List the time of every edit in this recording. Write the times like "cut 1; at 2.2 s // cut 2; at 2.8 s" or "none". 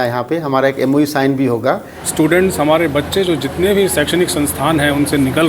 cut 1; at 1.8 s